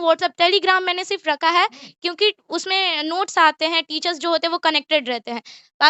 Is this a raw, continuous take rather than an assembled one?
yes; 0 cuts

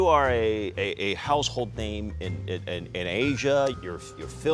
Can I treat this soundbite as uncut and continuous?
yes; 0 cuts

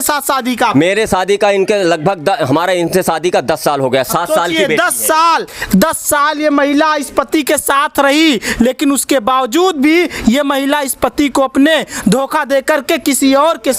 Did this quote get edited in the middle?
no; 0 cuts

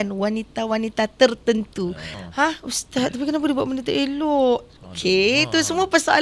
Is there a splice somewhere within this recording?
yes; 1 cut; at 2.1 s

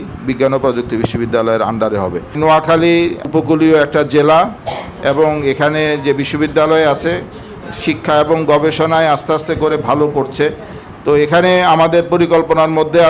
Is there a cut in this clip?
yes; 2 cuts; at 2.4 s, 3.2 s

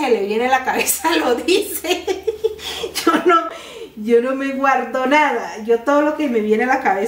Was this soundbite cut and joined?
no; 0 cuts

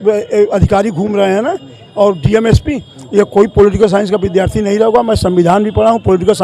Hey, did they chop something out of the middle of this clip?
no; 0 cuts

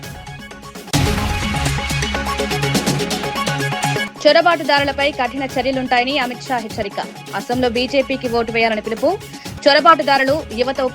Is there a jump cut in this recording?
yes; 2 cuts; at 0.9 s, 4.0 s

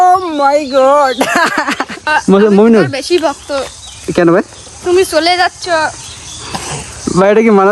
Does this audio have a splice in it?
yes; 1 cut; at 2.1 s

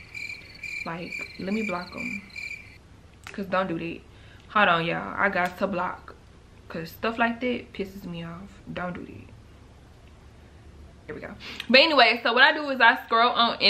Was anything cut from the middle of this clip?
no; 0 cuts

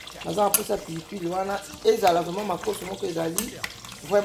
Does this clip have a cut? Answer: no; 0 cuts

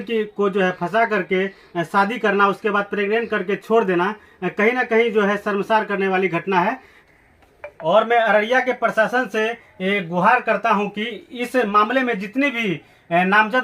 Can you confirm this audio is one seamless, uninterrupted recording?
yes; 0 cuts

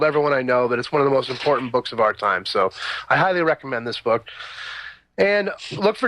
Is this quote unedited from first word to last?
no; 1 cut; at 4.3 s

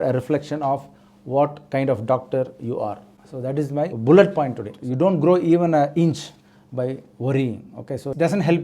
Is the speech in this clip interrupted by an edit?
yes; 1 cut; at 4.8 s

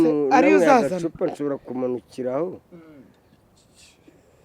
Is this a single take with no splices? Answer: yes; 0 cuts

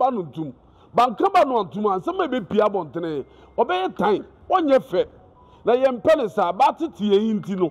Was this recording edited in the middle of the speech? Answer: yes; 1 cut; at 4.3 s

